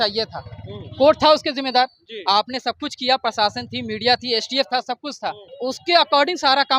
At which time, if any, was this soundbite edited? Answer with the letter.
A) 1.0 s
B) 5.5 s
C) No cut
B